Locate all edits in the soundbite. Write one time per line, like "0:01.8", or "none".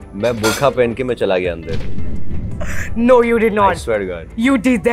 none